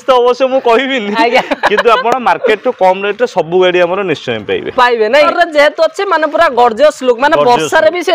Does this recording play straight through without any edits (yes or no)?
no